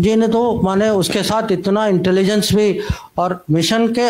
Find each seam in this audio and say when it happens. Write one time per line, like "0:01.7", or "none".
none